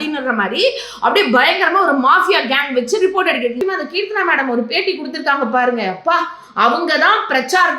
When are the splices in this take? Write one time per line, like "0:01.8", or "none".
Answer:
0:03.6